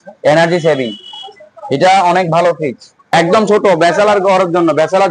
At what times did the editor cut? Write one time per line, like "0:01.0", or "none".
0:03.1